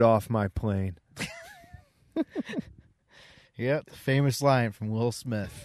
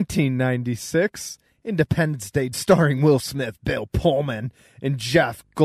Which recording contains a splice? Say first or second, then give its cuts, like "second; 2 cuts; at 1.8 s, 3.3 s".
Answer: second; 1 cut; at 2.6 s